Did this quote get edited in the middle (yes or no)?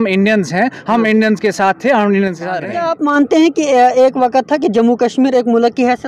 yes